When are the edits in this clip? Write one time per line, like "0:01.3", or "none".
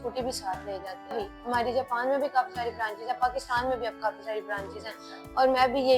0:01.1